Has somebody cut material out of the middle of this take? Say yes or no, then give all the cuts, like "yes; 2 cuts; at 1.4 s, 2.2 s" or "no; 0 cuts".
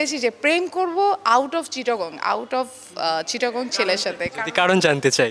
no; 0 cuts